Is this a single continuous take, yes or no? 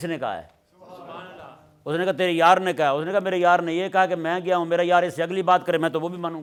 yes